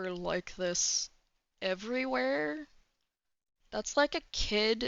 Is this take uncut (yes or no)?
yes